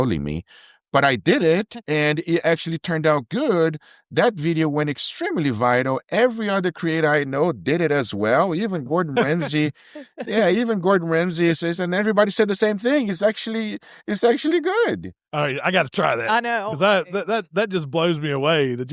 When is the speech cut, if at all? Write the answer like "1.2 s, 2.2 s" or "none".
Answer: none